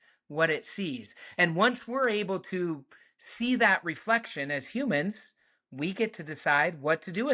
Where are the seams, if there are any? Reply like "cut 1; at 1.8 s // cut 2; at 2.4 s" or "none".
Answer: none